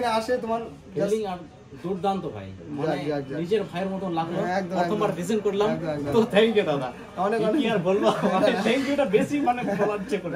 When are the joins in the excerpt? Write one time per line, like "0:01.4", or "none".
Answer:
none